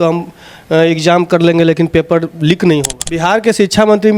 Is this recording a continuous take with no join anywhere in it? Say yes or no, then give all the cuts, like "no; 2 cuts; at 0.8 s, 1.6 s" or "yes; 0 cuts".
no; 1 cut; at 3.0 s